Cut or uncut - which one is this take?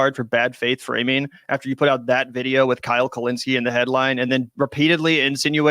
cut